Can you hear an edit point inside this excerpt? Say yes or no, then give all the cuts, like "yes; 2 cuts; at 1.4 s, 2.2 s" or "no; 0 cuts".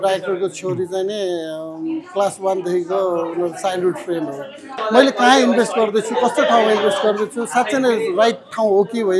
yes; 1 cut; at 4.7 s